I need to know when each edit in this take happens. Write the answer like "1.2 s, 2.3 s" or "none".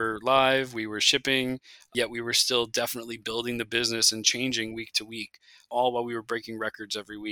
1.9 s, 5.7 s